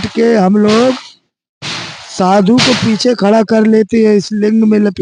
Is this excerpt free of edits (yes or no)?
yes